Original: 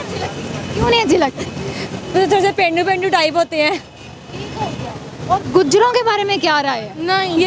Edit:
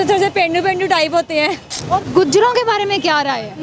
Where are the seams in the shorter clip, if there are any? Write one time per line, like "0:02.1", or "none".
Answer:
0:01.7